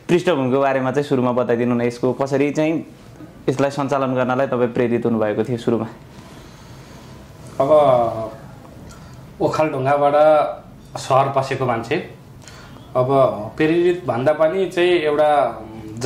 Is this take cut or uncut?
uncut